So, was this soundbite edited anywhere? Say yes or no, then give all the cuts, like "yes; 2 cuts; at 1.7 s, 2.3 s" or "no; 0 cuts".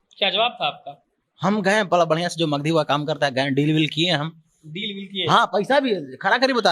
no; 0 cuts